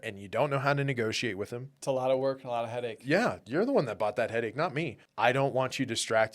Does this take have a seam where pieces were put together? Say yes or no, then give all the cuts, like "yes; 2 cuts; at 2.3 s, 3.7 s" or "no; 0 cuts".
yes; 2 cuts; at 1.7 s, 5.0 s